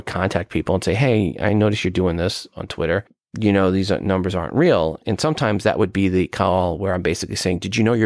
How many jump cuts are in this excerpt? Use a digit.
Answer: 2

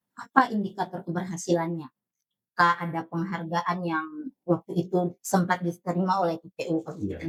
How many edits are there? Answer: 0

